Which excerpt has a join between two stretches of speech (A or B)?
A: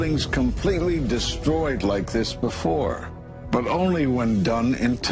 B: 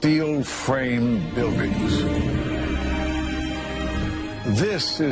B